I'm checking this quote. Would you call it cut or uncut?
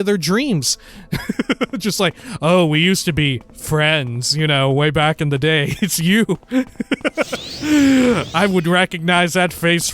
cut